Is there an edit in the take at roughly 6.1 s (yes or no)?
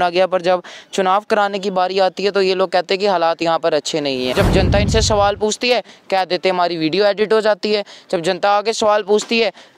no